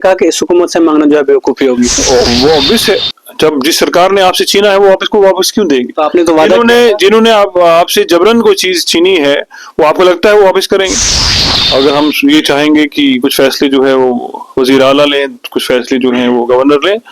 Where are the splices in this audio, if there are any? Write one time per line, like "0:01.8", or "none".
0:11.2

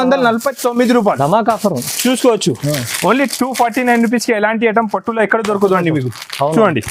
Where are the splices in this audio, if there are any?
none

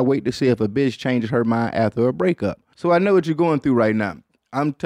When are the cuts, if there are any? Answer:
0:02.7

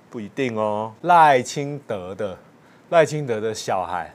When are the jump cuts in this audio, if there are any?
0:00.9

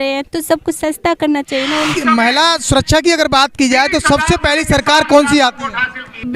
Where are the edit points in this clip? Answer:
0:01.9

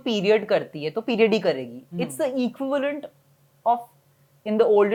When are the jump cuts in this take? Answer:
none

